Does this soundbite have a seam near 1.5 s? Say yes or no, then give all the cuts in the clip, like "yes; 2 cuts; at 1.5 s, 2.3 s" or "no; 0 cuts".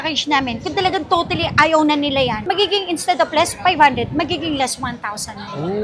no; 0 cuts